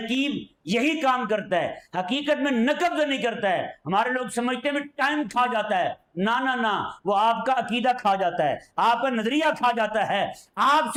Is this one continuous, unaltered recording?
yes; 0 cuts

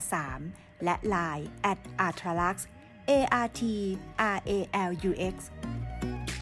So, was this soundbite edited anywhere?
yes; 1 cut; at 5.5 s

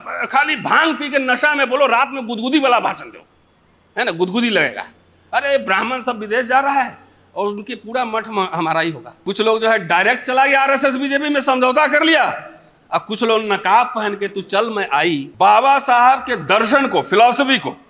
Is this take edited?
yes; 2 cuts; at 9.1 s, 15.3 s

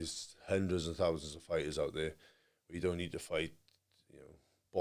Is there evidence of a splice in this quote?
no; 0 cuts

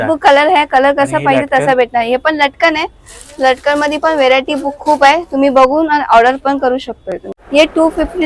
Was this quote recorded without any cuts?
no; 1 cut; at 7.3 s

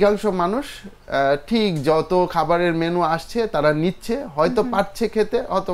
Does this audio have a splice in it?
no; 0 cuts

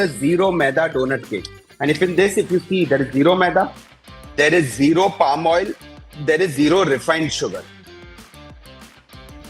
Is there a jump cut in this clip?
no; 0 cuts

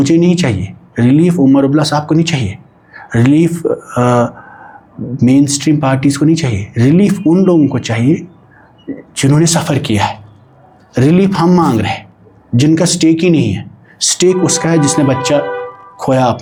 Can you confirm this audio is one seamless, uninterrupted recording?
yes; 0 cuts

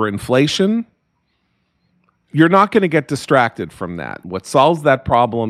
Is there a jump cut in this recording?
yes; 1 cut; at 4.2 s

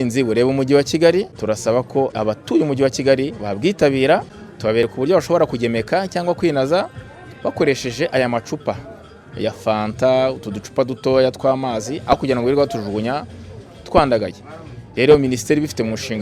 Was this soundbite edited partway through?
yes; 3 cuts; at 1.3 s, 2.1 s, 4.9 s

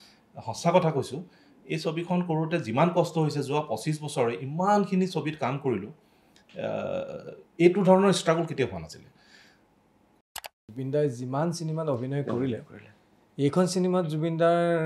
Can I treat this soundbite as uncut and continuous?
no; 1 cut; at 10.1 s

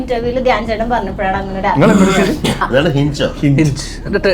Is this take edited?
yes; 1 cut; at 2.7 s

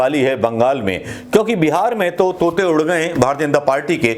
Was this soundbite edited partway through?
no; 0 cuts

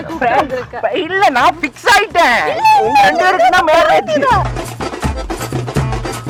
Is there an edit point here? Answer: no; 0 cuts

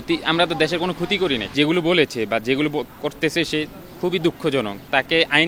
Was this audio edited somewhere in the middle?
yes; 1 cut; at 1.5 s

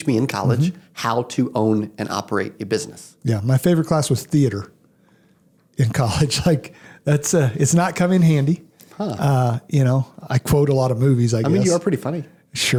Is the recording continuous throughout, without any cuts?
yes; 0 cuts

